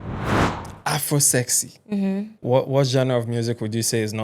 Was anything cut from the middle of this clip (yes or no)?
yes